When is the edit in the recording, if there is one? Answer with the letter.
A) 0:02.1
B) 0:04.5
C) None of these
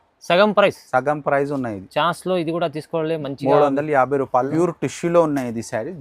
B